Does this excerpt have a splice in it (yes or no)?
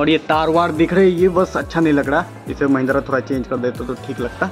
no